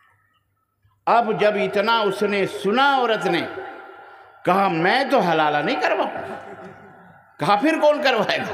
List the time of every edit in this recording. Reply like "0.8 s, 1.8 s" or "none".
none